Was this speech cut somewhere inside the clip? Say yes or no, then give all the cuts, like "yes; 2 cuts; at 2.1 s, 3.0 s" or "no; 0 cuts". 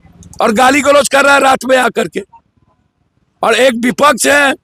no; 0 cuts